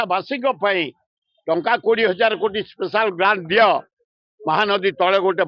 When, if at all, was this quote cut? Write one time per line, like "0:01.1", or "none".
none